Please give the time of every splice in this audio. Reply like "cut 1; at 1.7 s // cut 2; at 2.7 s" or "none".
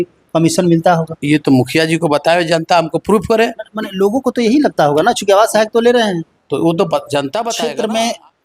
cut 1; at 7.5 s